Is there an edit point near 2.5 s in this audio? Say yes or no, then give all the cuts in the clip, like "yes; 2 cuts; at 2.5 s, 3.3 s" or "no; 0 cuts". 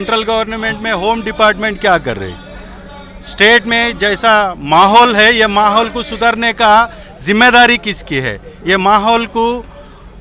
no; 0 cuts